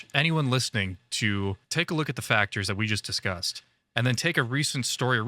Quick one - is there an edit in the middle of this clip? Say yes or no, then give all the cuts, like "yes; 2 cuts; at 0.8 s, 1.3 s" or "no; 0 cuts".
yes; 1 cut; at 1.6 s